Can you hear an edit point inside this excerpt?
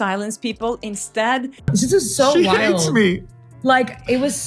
yes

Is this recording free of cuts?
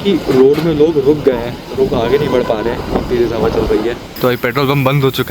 no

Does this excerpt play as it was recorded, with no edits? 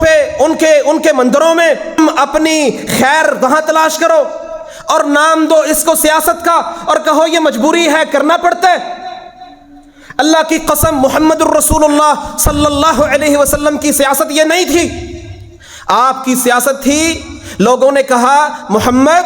no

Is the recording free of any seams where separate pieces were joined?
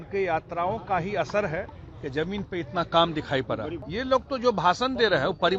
no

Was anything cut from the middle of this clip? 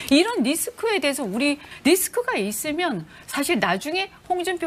yes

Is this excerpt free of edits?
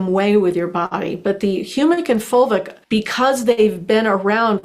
no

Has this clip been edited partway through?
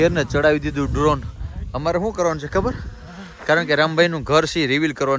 no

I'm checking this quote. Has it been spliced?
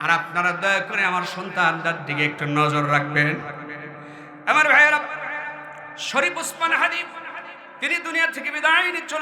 no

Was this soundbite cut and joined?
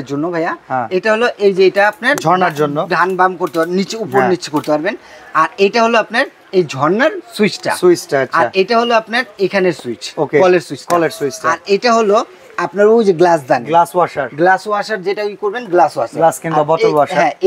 no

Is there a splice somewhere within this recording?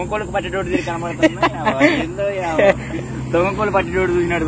no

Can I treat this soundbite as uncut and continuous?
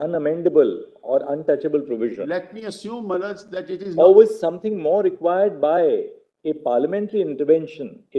yes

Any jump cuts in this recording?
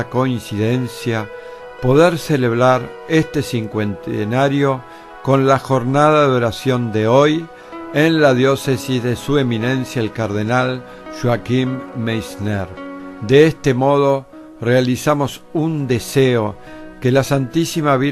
yes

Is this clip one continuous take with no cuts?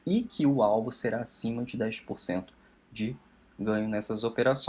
yes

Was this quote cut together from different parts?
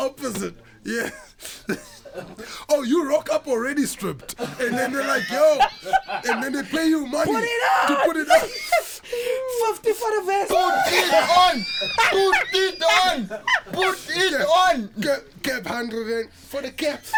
no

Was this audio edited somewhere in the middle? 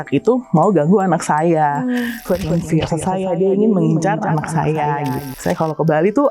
yes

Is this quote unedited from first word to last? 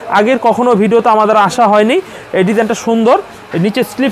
yes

